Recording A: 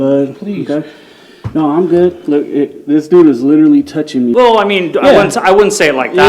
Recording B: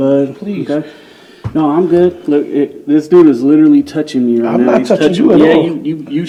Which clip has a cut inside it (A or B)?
A